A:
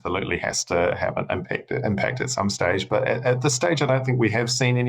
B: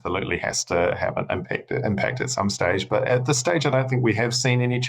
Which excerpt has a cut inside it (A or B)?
B